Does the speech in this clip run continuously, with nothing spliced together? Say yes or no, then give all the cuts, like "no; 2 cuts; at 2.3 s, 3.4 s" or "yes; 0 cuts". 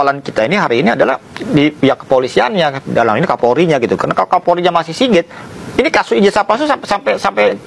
yes; 0 cuts